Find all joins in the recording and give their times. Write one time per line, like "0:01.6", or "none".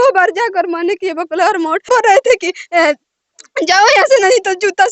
0:01.8

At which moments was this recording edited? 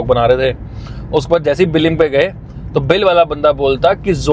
none

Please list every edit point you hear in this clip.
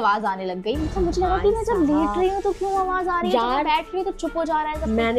none

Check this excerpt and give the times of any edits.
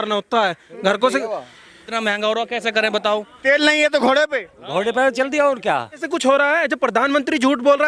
0:01.8
0:06.0

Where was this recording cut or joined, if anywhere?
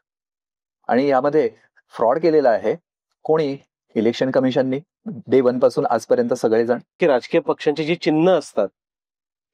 0:07.0

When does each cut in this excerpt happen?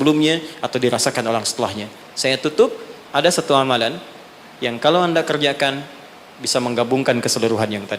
0:02.0

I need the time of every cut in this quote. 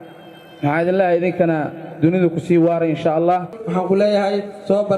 0:03.6

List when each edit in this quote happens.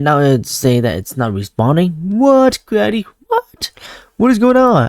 none

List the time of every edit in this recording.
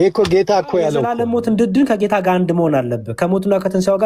0:01.1

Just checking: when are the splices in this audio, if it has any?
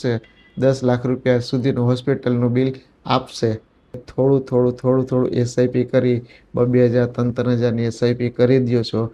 0:03.9

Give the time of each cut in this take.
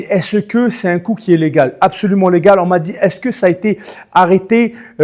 none

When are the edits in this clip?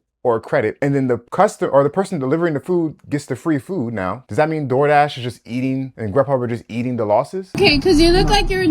0:01.1
0:04.2
0:05.9
0:07.6

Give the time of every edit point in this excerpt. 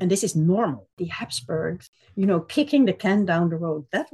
0:00.9
0:01.9

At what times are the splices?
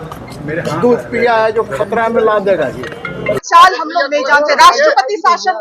0:03.4

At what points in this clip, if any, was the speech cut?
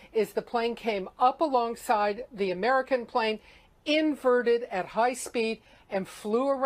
0:02.6

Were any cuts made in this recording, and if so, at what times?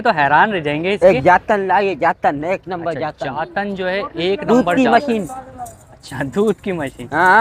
0:01.0

